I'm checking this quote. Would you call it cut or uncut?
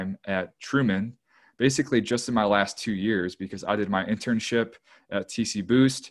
uncut